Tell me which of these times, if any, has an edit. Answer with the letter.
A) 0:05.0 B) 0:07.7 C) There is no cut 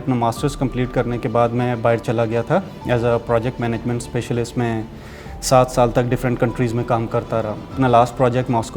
B